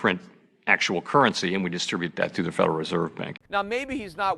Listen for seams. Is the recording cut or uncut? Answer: cut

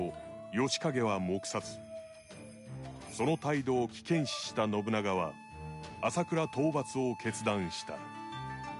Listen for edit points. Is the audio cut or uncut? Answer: cut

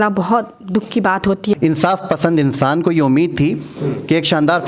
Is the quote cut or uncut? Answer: cut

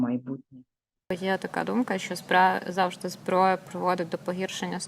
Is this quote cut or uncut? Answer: cut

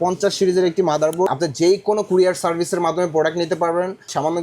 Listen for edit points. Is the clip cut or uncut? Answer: cut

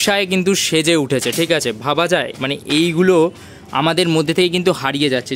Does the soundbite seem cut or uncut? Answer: uncut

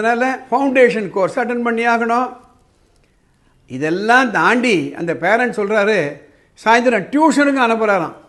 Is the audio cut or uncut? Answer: uncut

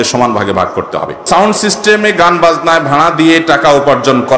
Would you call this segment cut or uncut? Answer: cut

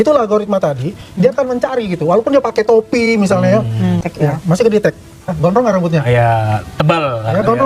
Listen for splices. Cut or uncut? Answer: cut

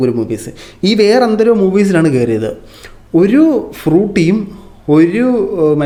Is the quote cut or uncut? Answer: uncut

